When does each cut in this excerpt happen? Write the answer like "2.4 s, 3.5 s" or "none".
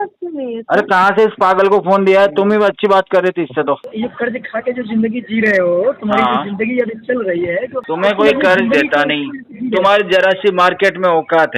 3.9 s, 7.8 s